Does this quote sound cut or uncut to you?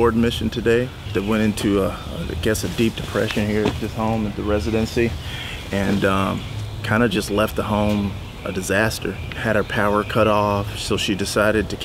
uncut